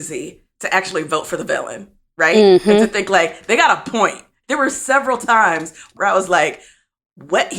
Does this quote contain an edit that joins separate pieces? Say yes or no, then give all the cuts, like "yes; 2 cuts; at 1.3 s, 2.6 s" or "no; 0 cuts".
yes; 2 cuts; at 4.4 s, 5.9 s